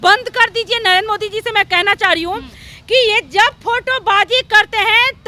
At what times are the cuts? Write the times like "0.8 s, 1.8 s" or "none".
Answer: none